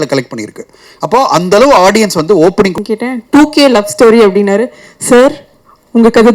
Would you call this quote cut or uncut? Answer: cut